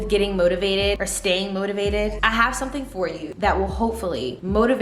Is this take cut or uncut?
cut